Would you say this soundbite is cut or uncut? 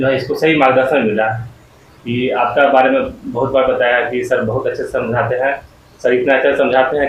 uncut